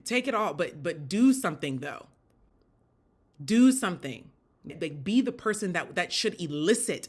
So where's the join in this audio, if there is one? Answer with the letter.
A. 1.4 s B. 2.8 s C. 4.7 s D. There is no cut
C